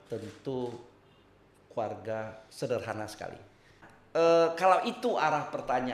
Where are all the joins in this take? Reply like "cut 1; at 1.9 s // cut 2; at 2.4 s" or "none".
cut 1; at 3.8 s